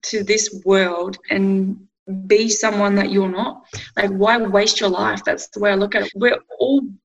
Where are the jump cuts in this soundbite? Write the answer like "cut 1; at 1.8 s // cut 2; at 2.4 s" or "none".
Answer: cut 1; at 6.0 s